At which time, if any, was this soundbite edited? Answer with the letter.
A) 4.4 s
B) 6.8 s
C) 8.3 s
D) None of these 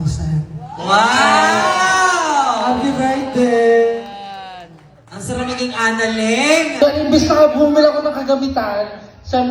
B